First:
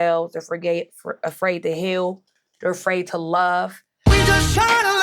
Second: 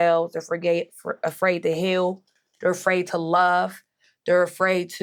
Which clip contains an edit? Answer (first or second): first